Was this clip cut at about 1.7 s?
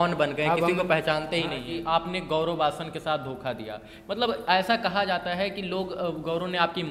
yes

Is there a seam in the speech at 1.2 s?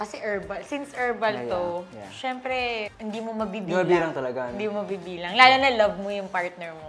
no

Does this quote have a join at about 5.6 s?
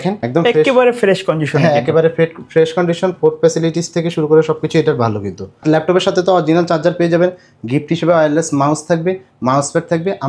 yes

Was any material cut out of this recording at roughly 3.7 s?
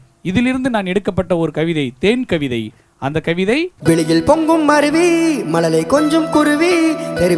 yes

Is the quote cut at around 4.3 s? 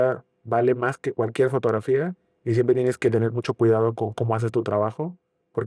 no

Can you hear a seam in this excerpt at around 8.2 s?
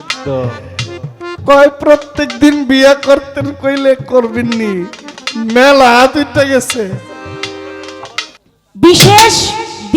yes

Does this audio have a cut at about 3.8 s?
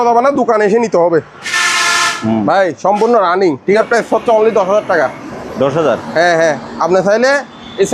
yes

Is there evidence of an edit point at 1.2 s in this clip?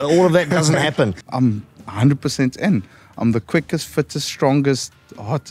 yes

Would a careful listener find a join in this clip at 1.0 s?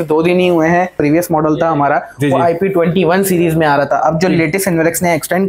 yes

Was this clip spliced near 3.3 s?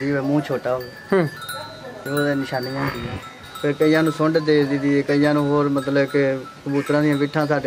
yes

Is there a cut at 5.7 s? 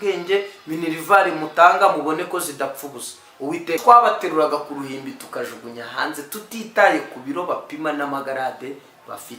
no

